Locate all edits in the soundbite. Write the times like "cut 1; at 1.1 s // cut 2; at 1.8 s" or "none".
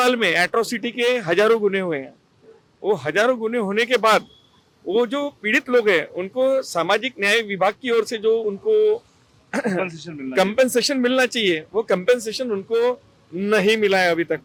none